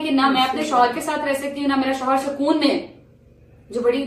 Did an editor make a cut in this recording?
no; 0 cuts

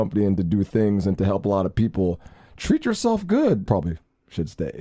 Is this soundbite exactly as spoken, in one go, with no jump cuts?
no; 1 cut; at 3.6 s

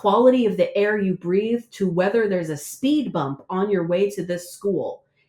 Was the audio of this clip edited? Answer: no; 0 cuts

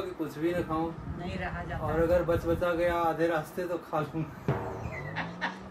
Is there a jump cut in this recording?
no; 0 cuts

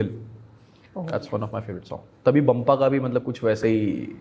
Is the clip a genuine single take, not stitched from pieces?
yes; 0 cuts

